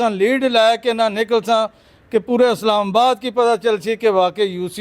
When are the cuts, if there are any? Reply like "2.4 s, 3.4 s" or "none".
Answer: none